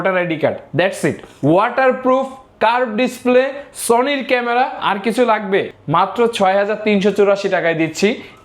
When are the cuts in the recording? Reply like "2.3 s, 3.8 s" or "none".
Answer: 1.3 s, 5.8 s